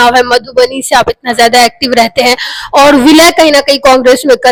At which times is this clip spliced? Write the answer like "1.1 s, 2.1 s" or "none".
none

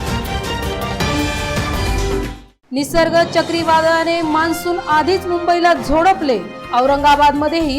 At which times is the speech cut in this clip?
2.4 s

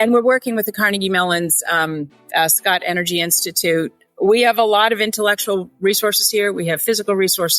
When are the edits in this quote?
4.0 s

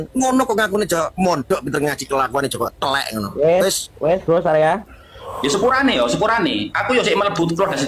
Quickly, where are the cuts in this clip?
4.9 s

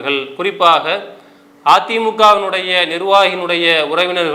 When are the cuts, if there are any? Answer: none

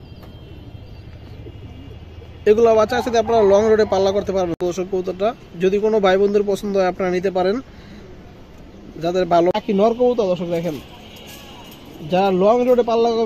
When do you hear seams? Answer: 4.6 s, 9.5 s

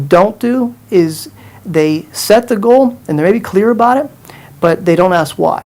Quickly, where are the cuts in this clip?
none

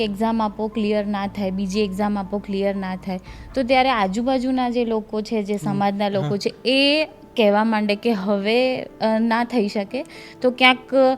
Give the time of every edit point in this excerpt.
none

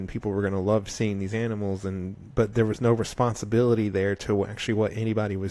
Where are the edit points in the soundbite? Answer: none

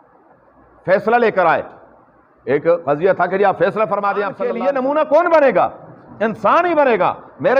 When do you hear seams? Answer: 4.4 s

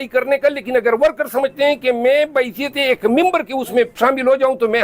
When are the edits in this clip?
3.9 s

